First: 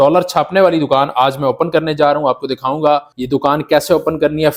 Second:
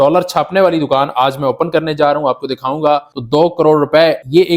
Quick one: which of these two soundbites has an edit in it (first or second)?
second